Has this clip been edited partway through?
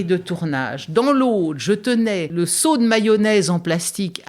yes; 1 cut; at 2.3 s

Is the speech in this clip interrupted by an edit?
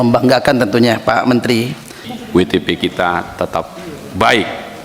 yes; 1 cut; at 2.1 s

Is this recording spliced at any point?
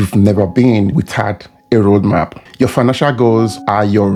no; 0 cuts

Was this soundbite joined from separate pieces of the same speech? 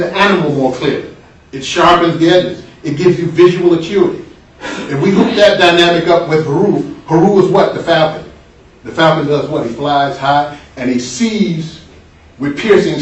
no; 0 cuts

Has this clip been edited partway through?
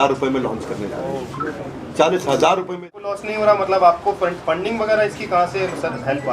yes; 1 cut; at 2.9 s

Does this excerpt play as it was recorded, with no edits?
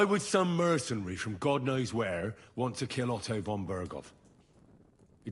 yes; 0 cuts

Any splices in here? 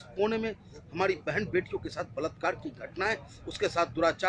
no; 0 cuts

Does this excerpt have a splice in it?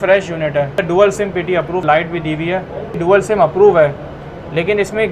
yes; 3 cuts; at 0.8 s, 1.8 s, 3.0 s

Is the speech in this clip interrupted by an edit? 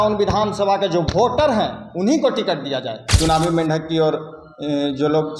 yes; 1 cut; at 3.1 s

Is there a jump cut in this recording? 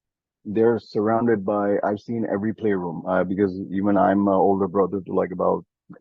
no; 0 cuts

